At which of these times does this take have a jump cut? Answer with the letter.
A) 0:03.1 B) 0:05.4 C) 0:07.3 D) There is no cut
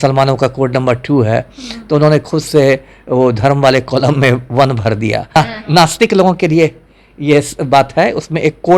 B